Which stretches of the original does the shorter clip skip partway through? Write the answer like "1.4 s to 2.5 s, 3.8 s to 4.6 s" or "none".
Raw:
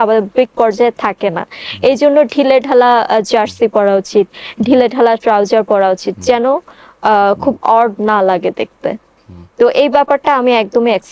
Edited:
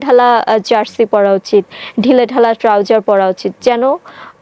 none